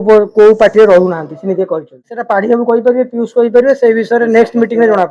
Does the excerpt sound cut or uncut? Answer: cut